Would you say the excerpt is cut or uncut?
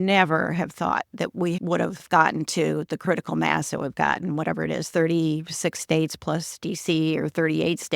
cut